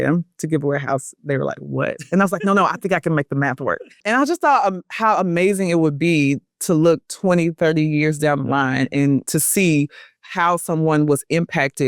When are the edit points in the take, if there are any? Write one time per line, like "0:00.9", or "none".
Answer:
0:09.3